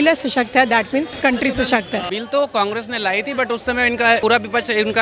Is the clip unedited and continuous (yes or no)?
no